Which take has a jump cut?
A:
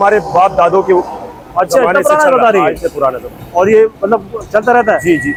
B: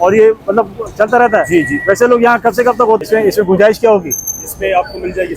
B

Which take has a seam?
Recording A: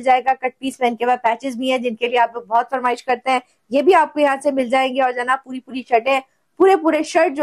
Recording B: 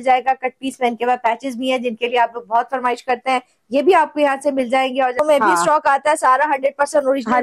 B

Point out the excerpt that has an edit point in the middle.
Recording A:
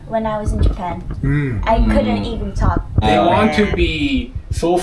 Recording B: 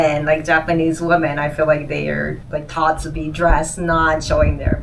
A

